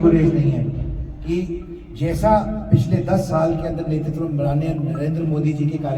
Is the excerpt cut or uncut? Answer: uncut